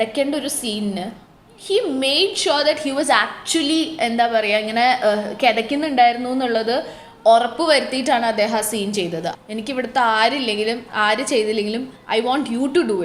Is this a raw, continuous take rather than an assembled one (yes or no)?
no